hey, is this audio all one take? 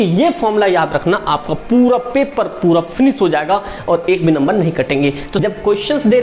no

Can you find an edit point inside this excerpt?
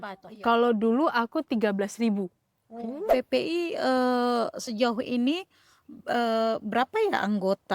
yes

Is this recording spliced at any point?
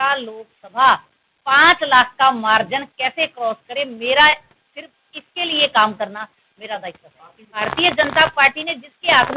yes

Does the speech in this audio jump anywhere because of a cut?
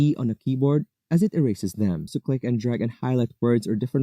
yes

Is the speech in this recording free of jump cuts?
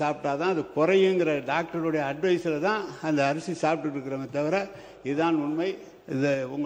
yes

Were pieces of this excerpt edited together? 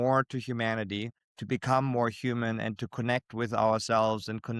yes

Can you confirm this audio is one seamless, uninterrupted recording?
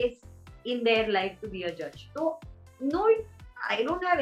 yes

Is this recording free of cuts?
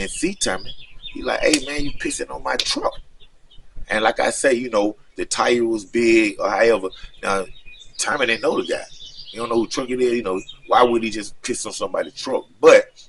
yes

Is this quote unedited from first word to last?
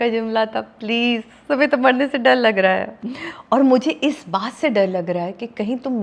yes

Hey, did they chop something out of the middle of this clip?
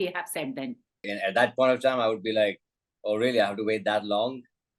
yes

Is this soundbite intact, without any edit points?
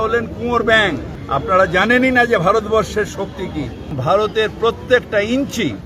no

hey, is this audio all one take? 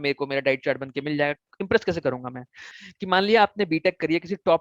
no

